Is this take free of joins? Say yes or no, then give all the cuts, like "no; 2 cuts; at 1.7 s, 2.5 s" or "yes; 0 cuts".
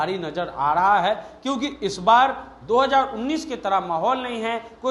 yes; 0 cuts